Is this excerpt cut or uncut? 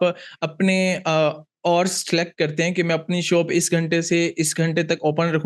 uncut